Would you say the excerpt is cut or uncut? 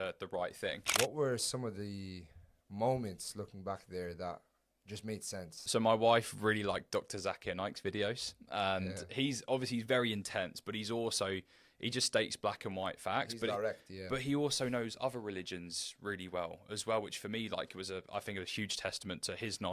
cut